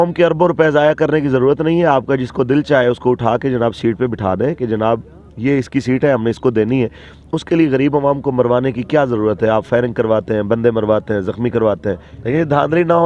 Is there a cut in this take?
yes; 1 cut; at 12.1 s

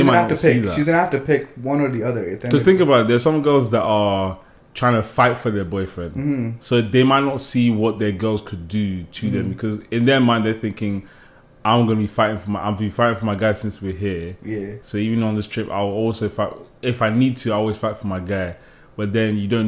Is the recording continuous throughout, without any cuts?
yes; 0 cuts

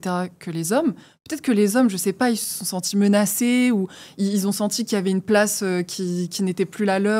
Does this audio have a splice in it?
no; 0 cuts

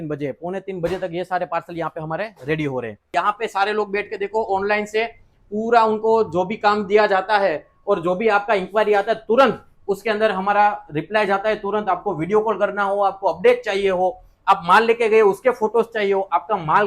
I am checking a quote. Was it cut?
yes; 1 cut; at 3.1 s

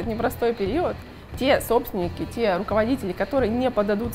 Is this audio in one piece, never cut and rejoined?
yes; 0 cuts

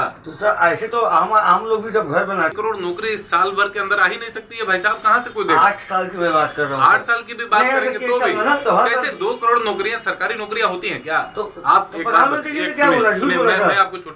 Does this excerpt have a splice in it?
yes; 1 cut; at 2.5 s

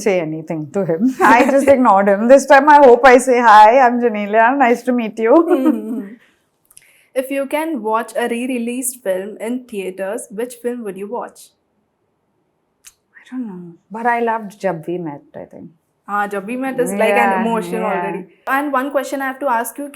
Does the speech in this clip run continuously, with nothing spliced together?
yes; 0 cuts

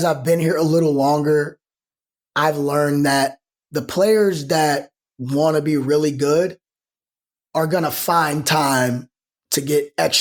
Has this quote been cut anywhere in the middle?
no; 0 cuts

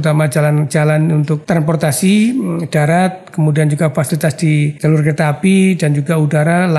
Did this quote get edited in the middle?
yes; 2 cuts; at 1.4 s, 4.8 s

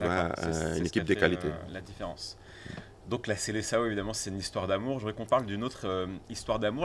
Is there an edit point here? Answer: no; 0 cuts

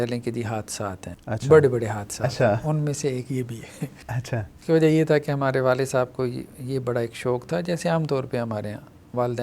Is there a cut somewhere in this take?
no; 0 cuts

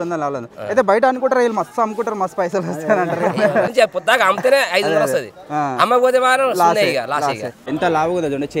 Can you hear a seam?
yes; 2 cuts; at 3.7 s, 7.5 s

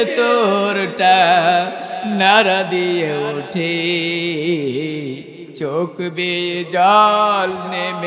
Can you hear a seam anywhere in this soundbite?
no; 0 cuts

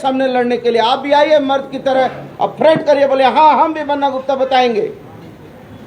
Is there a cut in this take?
no; 0 cuts

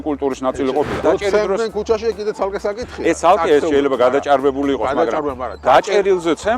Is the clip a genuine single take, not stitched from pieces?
no; 1 cut; at 1.0 s

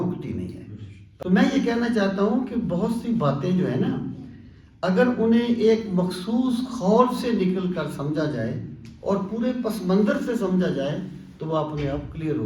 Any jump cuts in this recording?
yes; 1 cut; at 1.0 s

